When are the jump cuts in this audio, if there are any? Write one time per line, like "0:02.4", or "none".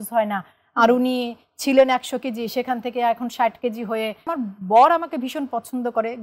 0:04.3